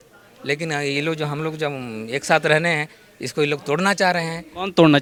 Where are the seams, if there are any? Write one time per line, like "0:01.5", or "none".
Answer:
none